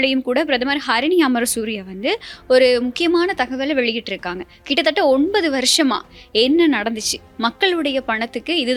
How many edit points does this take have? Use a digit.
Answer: 0